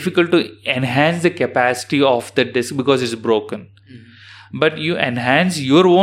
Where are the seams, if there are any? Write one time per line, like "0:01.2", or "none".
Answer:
none